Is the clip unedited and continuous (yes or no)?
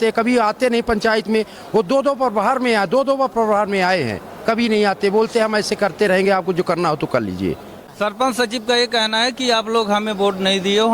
no